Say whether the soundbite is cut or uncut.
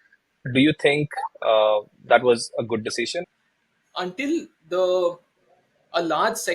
cut